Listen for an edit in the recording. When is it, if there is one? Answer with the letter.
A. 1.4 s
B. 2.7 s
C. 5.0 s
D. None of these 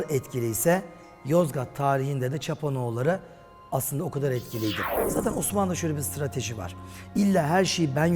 C